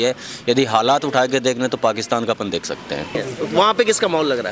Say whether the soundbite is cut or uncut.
cut